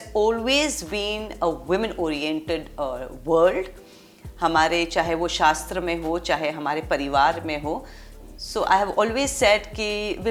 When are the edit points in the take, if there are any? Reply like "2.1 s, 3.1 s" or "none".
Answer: none